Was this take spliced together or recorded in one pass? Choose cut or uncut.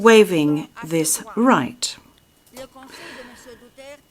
uncut